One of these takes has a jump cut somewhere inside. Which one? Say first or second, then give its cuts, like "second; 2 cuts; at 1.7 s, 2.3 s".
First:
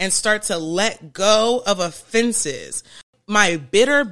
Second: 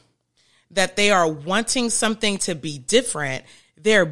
first; 1 cut; at 3.1 s